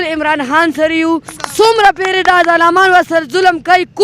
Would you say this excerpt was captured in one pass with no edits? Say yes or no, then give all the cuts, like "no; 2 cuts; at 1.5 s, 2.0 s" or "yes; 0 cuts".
no; 1 cut; at 1.4 s